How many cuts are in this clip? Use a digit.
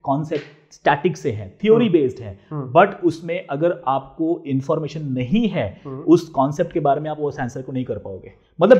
0